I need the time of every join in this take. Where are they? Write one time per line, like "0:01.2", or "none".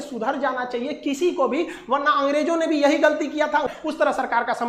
0:03.7